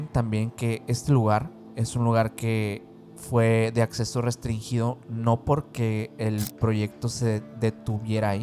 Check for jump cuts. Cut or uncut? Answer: uncut